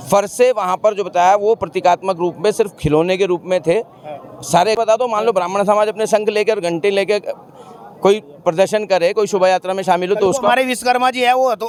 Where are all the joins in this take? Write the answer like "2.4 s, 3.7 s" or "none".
none